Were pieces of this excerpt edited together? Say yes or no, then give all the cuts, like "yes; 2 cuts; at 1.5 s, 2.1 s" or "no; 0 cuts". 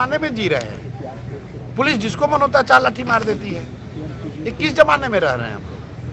no; 0 cuts